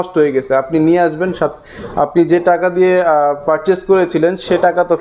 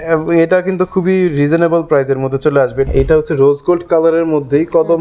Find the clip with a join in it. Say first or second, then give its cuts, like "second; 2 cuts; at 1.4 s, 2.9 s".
second; 1 cut; at 2.9 s